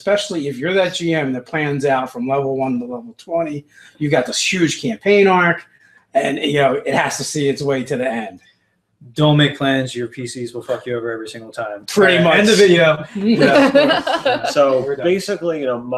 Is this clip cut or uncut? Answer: cut